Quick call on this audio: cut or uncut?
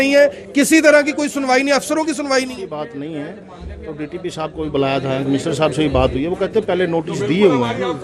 uncut